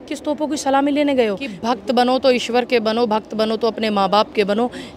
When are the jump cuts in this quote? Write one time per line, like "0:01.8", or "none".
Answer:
0:01.5